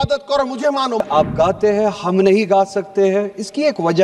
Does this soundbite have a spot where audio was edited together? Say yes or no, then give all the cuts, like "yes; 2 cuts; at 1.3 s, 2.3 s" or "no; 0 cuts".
yes; 1 cut; at 1.0 s